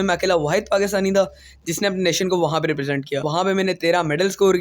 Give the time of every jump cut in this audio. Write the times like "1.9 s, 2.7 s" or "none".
3.3 s